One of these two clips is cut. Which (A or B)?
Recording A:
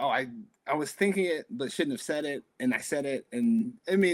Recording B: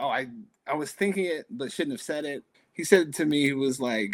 B